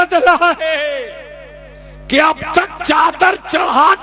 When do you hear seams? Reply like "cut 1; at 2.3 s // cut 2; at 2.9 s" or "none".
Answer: none

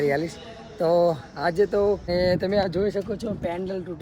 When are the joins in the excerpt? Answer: cut 1; at 2.0 s

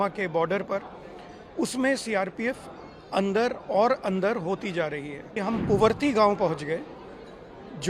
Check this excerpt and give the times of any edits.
cut 1; at 5.4 s

